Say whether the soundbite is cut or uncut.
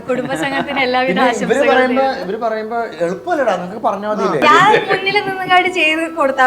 cut